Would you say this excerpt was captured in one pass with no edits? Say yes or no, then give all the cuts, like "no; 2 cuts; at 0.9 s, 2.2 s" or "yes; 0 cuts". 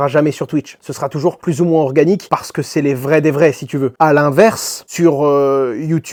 yes; 0 cuts